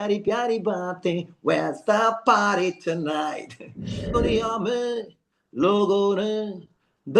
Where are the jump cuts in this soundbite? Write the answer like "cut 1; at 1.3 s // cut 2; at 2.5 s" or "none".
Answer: cut 1; at 4.2 s